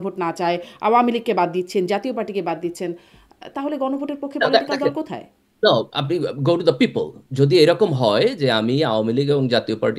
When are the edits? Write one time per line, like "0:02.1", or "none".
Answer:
none